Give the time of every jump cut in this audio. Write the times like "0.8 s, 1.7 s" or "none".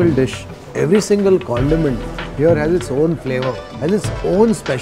3.6 s